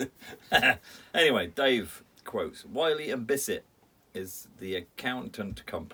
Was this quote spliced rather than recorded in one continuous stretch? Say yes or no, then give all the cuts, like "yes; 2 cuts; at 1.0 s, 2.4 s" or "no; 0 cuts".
no; 0 cuts